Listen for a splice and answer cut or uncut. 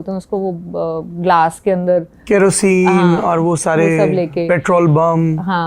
uncut